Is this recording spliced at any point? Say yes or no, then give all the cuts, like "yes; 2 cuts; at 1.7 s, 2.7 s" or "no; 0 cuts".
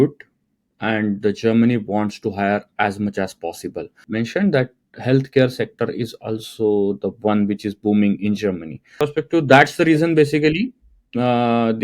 yes; 2 cuts; at 4.0 s, 9.0 s